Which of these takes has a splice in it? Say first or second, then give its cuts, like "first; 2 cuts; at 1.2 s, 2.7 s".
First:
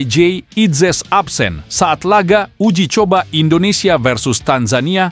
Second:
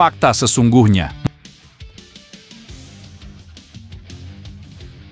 second; 1 cut; at 1.1 s